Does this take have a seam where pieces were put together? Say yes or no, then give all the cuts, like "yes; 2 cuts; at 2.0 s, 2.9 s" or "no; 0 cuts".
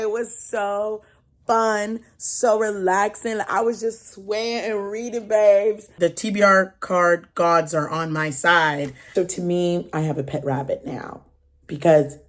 yes; 2 cuts; at 5.9 s, 9.0 s